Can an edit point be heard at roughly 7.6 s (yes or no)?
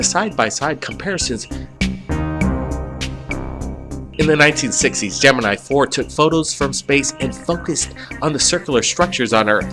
yes